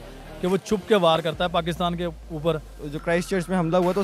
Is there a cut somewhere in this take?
yes; 1 cut; at 2.7 s

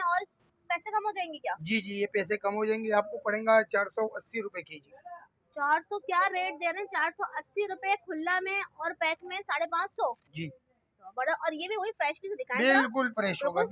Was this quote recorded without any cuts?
yes; 0 cuts

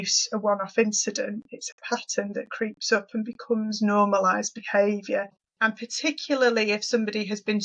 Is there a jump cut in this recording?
yes; 1 cut; at 5.4 s

